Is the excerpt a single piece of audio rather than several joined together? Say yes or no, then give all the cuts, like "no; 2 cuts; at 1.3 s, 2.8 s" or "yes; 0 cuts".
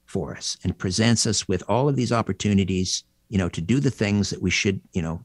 yes; 0 cuts